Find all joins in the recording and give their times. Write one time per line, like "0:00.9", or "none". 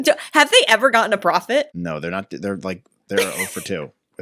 0:01.7